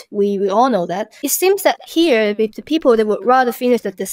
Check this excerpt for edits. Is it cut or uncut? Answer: cut